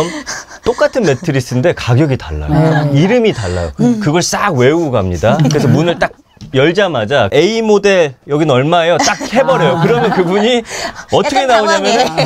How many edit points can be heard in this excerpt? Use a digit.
0